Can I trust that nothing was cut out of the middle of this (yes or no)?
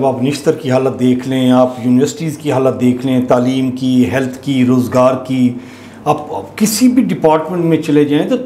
yes